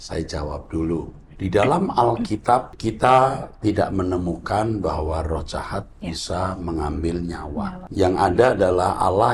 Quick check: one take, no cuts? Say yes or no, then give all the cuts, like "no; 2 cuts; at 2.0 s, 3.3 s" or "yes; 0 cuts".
no; 3 cuts; at 1.2 s, 2.7 s, 7.8 s